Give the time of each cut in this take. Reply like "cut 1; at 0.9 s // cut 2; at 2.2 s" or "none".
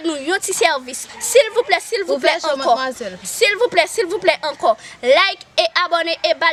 none

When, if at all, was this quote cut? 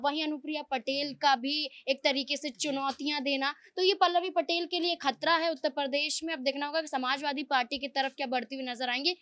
none

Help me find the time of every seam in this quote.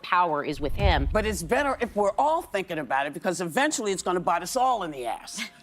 cut 1; at 1.1 s

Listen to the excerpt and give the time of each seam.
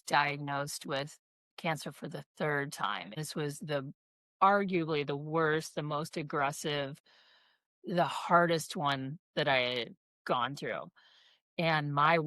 cut 1; at 3.2 s

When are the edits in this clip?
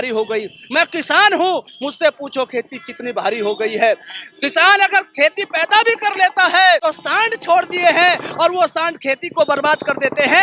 cut 1; at 6.8 s

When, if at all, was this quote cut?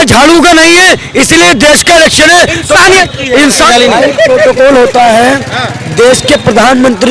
none

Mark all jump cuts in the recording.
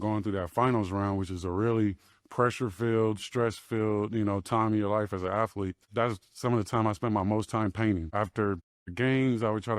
cut 1; at 8.5 s

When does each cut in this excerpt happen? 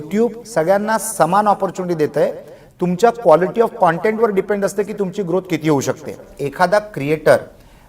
cut 1; at 6.4 s

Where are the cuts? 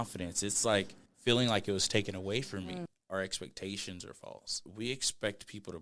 cut 1; at 1.0 s // cut 2; at 2.9 s // cut 3; at 4.6 s

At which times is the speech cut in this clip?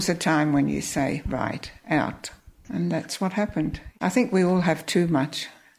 cut 1; at 3.8 s

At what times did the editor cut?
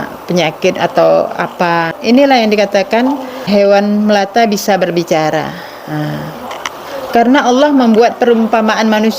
cut 1; at 1.9 s // cut 2; at 3.4 s // cut 3; at 6.5 s

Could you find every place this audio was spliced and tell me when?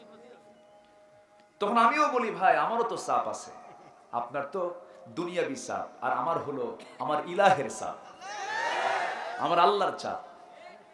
none

